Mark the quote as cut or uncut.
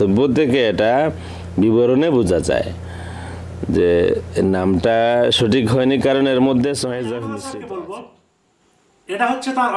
cut